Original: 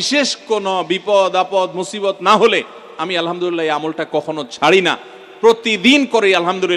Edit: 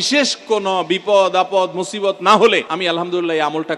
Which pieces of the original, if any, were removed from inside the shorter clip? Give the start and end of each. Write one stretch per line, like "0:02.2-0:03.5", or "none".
0:02.7-0:03.0